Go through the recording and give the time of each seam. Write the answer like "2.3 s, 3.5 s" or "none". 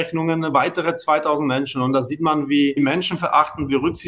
2.8 s